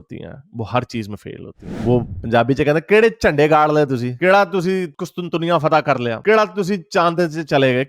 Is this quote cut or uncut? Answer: cut